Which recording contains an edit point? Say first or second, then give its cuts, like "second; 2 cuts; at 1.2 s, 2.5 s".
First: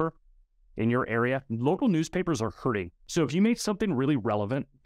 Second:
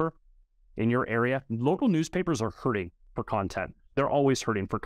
first; 1 cut; at 3.0 s